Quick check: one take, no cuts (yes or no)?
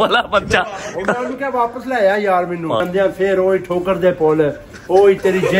no